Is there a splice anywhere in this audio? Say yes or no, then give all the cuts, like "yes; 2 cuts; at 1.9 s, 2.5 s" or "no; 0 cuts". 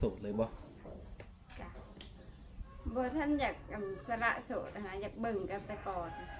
no; 0 cuts